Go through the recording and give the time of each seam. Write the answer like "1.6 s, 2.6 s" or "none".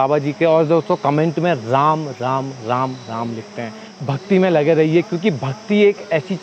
3.9 s